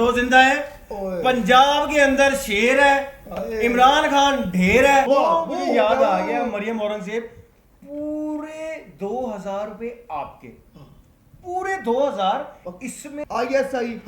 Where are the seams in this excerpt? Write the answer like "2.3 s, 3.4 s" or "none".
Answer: 5.1 s, 13.1 s